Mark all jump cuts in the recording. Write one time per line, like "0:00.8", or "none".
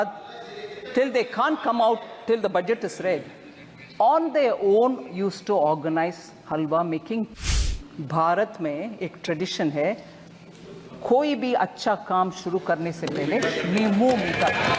0:07.4

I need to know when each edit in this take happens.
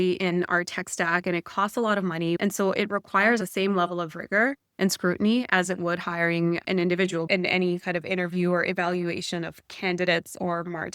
0:02.4
0:03.4
0:06.9

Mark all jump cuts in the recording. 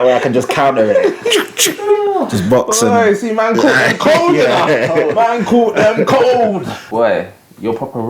0:06.8

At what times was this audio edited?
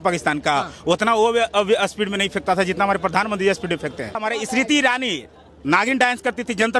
0:04.2

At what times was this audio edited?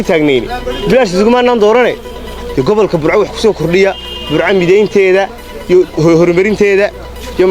none

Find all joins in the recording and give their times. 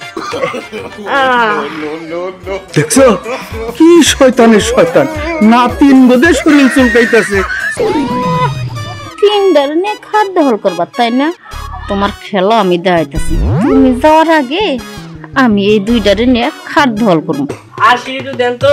0:07.6
0:17.6

